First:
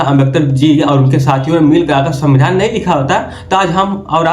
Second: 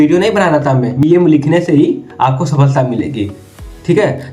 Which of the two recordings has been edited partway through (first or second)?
second